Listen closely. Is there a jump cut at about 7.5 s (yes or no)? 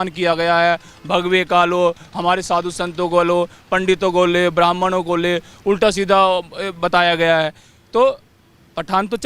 no